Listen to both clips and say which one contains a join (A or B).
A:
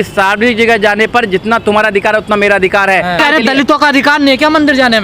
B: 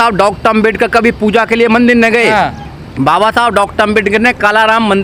A